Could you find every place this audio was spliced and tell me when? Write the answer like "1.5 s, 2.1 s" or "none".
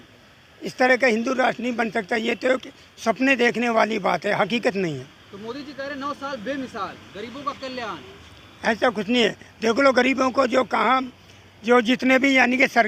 none